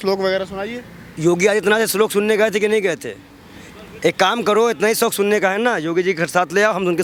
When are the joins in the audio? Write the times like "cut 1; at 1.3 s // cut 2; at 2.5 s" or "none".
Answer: none